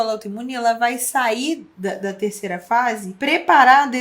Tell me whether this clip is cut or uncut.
cut